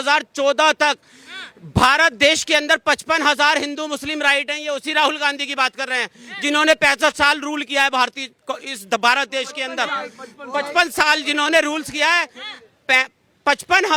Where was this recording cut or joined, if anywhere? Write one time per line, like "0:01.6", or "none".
none

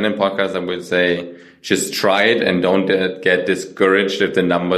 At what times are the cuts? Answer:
none

